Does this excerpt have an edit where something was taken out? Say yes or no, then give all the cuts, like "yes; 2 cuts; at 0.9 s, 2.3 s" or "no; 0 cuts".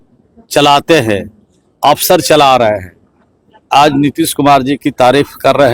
no; 0 cuts